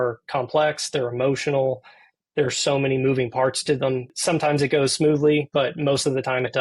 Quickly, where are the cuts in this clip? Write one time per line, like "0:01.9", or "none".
0:04.1